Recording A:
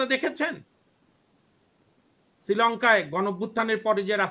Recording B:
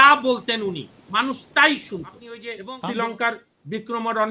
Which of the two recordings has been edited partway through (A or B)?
B